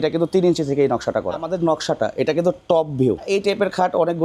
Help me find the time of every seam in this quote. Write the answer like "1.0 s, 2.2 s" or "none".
1.4 s, 3.2 s

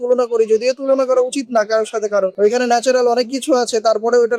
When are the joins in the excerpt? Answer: none

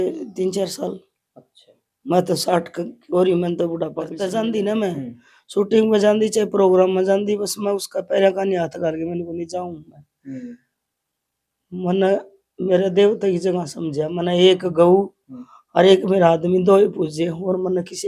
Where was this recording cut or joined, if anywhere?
4.1 s

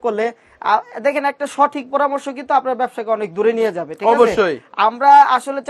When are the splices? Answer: none

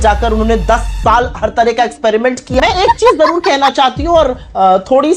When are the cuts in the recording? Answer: 2.4 s

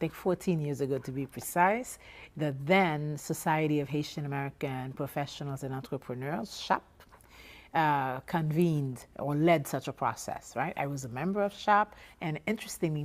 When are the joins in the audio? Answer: 9.3 s

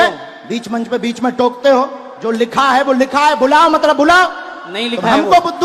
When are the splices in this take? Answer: none

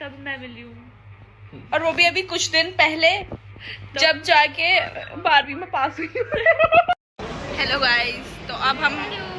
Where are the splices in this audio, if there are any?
6.9 s

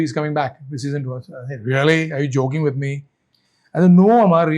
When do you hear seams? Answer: none

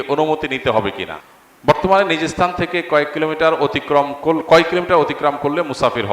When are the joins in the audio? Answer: 1.1 s

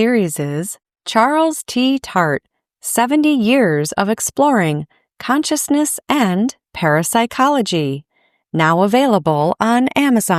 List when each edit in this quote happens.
none

